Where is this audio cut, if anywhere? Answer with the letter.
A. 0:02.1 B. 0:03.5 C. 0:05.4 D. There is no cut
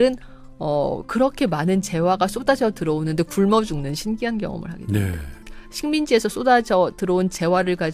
C